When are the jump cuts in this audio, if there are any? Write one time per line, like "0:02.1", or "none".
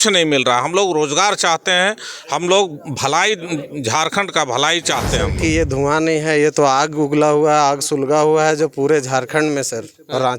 0:05.3